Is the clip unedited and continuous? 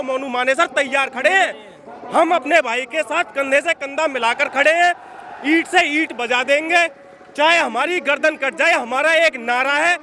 yes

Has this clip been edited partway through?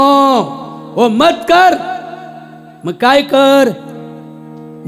no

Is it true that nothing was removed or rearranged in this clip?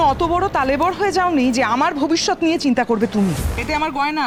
yes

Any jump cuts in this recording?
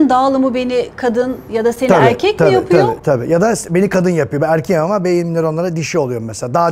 no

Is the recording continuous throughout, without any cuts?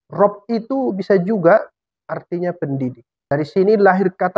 no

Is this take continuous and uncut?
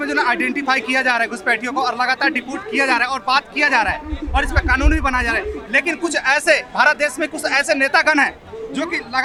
yes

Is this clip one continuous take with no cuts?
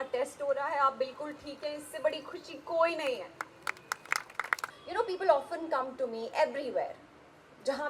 no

